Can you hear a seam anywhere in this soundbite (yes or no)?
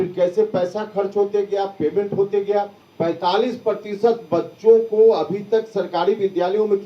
yes